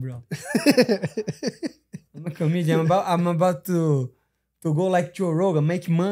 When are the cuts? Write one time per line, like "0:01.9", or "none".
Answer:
none